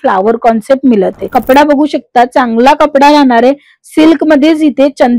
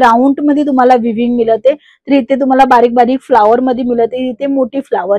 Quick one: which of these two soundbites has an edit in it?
first; 1 cut; at 1.2 s

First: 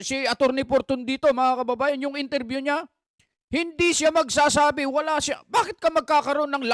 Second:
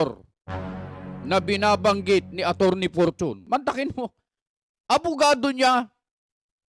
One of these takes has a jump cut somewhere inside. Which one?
second; 1 cut; at 3.4 s

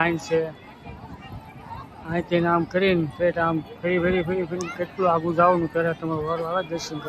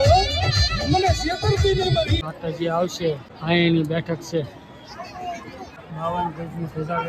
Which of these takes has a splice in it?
second; 2 cuts; at 2.2 s, 5.8 s

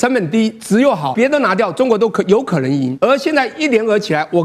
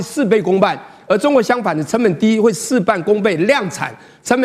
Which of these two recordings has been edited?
first; 2 cuts; at 1.1 s, 2.9 s

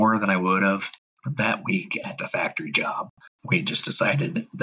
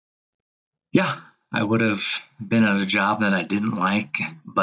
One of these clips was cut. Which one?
first; 1 cut; at 3.3 s

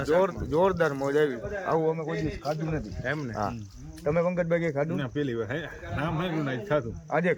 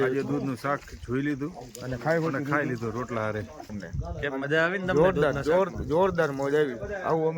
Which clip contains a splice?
second; 1 cut; at 3.8 s

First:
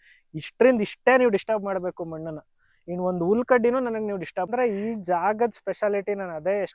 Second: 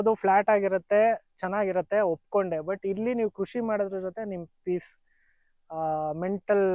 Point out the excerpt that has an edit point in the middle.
first; 1 cut; at 4.5 s

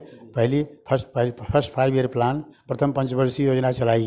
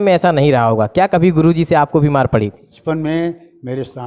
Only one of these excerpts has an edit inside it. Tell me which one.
second; 1 cut; at 2.7 s

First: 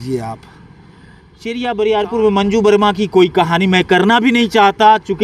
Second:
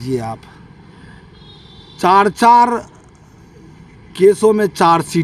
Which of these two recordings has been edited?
first; 1 cut; at 1.5 s

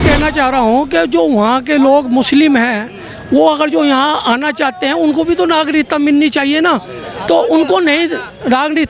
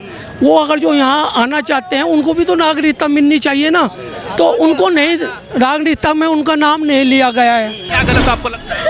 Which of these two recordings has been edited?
second; 1 cut; at 7.9 s

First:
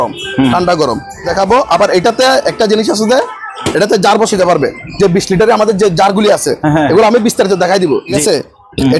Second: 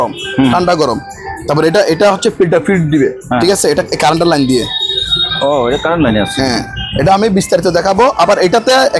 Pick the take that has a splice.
first; 2 cuts; at 1.3 s, 8.2 s

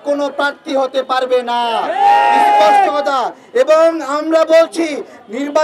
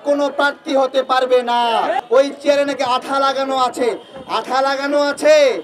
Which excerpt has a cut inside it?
second; 1 cut; at 1.9 s

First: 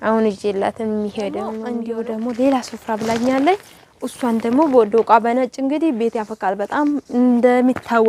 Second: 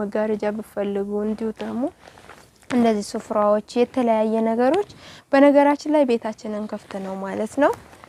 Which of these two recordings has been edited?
first; 1 cut; at 1.7 s

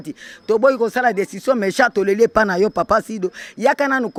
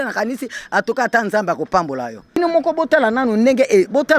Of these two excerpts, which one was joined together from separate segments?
second; 1 cut; at 2.4 s

